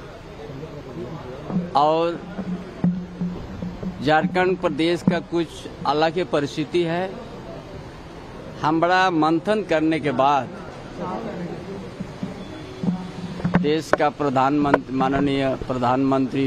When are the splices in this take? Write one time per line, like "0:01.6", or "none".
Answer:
0:12.7

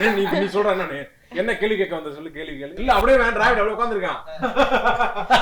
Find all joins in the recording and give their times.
0:02.8

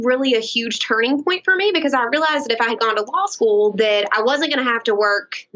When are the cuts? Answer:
none

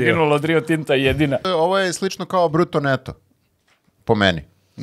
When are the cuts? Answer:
0:01.4

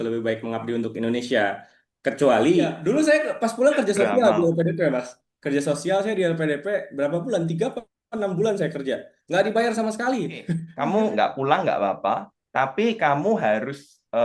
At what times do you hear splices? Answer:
0:02.8
0:10.6

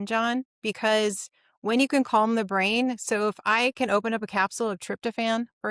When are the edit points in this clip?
none

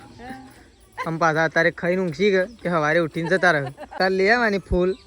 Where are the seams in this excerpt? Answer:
0:04.0

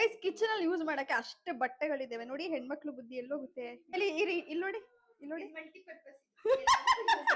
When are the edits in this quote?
0:03.9

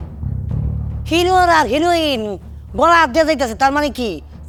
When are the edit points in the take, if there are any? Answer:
none

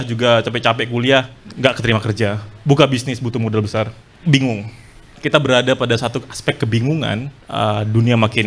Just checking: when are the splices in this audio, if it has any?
0:01.4
0:04.0
0:07.4

